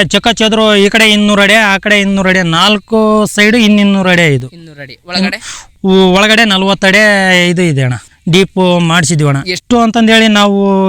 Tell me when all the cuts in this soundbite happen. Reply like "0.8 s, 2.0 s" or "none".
none